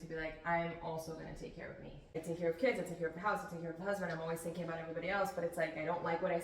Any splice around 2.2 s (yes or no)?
yes